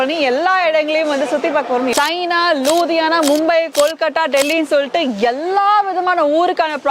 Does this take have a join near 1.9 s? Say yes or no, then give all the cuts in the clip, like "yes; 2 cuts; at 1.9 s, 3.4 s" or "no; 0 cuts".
yes; 1 cut; at 1.9 s